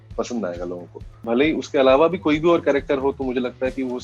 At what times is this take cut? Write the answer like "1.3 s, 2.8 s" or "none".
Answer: 1.1 s